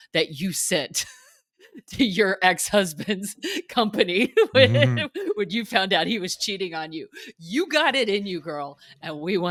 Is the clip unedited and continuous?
yes; 0 cuts

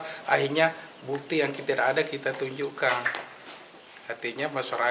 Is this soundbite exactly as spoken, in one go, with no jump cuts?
yes; 0 cuts

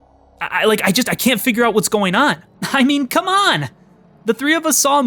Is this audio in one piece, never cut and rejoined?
no; 1 cut; at 2.5 s

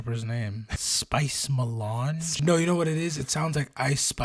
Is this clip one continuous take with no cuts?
no; 2 cuts; at 0.9 s, 2.4 s

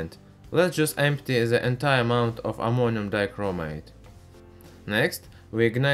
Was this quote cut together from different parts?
yes; 1 cut; at 1.9 s

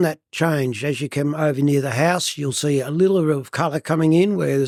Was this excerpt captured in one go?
yes; 0 cuts

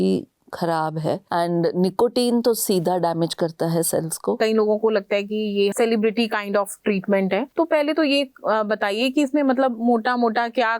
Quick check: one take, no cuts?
no; 4 cuts; at 1.2 s, 4.4 s, 5.7 s, 7.5 s

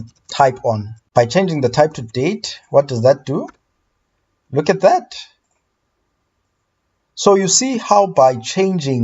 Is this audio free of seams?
no; 1 cut; at 0.9 s

